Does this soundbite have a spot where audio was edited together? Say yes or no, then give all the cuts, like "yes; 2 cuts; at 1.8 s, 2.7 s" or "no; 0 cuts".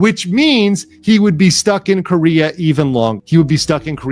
yes; 1 cut; at 3.2 s